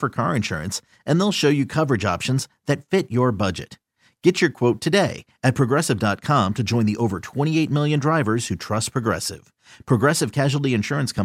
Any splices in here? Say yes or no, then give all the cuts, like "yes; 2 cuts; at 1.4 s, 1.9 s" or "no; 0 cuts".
no; 0 cuts